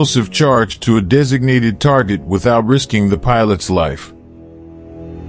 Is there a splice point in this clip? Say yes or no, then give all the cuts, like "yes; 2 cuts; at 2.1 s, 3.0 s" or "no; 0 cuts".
yes; 1 cut; at 4.1 s